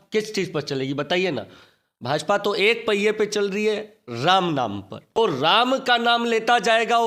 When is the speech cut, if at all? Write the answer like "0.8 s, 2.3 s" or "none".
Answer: 5.2 s